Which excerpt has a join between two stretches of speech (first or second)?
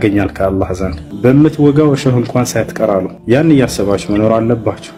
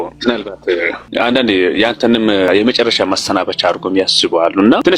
second